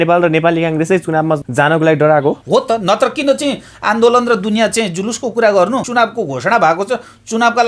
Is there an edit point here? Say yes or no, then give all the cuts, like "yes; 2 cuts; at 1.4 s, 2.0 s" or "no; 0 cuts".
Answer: yes; 3 cuts; at 1.5 s, 2.4 s, 5.9 s